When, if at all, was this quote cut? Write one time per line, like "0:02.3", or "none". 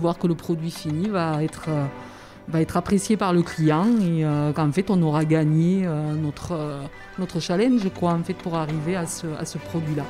none